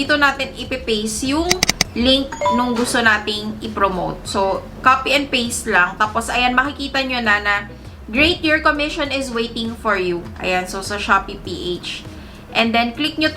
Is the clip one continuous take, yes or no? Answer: yes